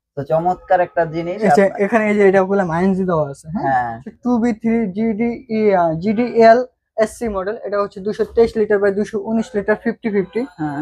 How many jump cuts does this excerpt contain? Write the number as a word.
one